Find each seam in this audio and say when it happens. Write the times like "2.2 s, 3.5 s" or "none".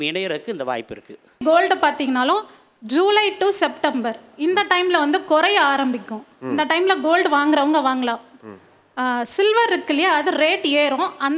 1.4 s